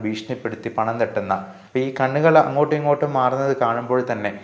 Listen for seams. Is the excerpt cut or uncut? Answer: cut